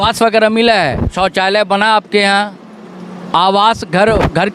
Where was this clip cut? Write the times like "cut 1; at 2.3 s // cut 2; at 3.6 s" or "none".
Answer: cut 1; at 1.1 s